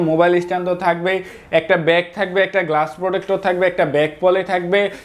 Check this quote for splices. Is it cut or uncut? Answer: uncut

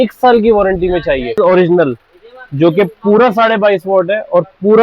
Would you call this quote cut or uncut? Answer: cut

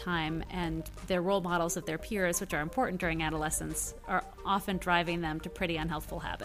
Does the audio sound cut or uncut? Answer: uncut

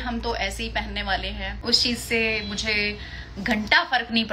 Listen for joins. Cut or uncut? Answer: cut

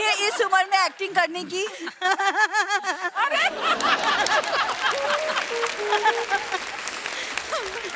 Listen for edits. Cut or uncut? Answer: uncut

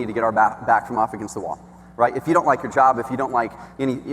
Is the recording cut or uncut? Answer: uncut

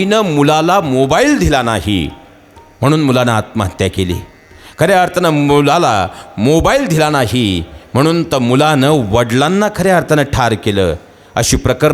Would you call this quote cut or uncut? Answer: uncut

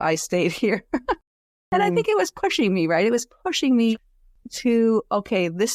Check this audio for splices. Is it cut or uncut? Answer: cut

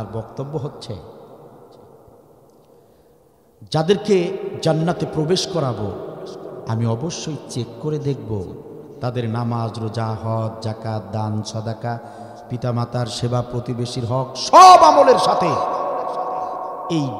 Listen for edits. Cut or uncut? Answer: uncut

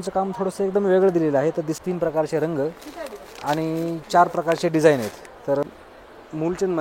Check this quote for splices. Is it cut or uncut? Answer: cut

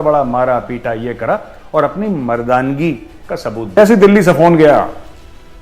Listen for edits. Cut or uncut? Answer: cut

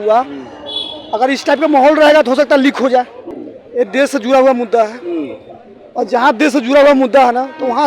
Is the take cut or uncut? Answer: cut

